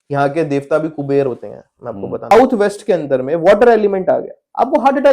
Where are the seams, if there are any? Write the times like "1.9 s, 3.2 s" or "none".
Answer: 2.3 s